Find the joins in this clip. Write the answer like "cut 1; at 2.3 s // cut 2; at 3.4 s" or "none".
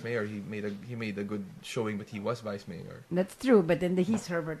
none